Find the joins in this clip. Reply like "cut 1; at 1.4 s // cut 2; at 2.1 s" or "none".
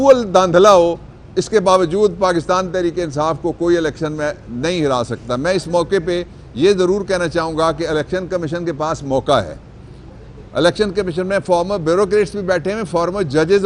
none